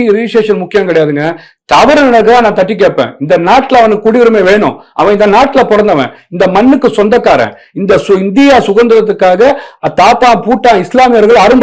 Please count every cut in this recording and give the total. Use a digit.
0